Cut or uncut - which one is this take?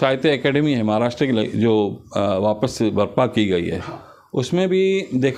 uncut